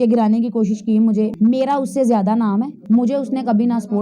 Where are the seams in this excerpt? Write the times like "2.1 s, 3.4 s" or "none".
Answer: 1.3 s, 2.8 s

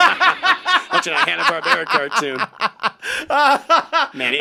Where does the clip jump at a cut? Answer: none

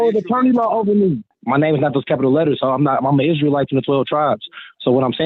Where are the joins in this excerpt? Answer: 1.3 s

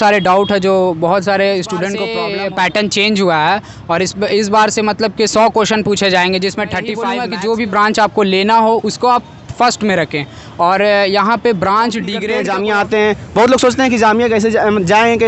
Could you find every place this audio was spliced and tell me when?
2.2 s, 7.1 s, 12.2 s

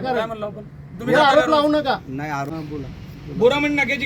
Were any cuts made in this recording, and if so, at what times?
2.6 s

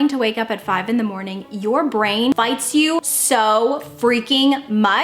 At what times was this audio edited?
2.7 s

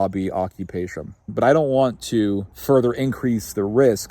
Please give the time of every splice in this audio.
1.3 s, 2.5 s

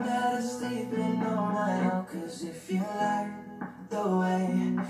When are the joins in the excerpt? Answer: none

